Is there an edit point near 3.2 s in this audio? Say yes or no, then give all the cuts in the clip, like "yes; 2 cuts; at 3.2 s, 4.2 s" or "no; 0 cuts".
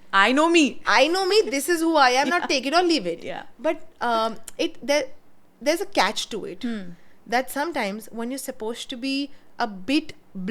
no; 0 cuts